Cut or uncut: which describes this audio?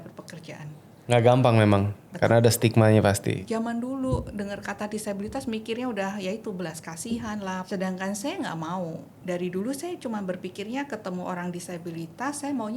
cut